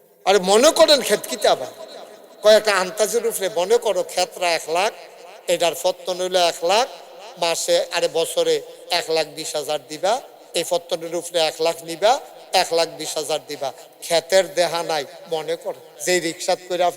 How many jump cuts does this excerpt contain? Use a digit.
1